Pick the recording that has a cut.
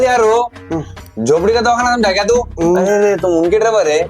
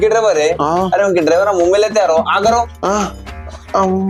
first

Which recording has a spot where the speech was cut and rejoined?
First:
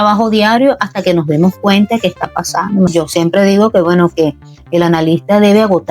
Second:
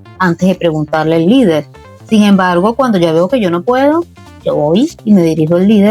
first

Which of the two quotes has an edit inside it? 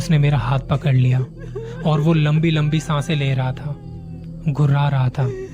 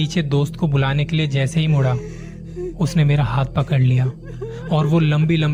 first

